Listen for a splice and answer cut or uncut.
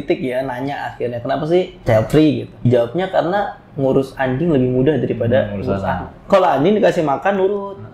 cut